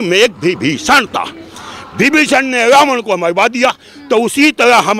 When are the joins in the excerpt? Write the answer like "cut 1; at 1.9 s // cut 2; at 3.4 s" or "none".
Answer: none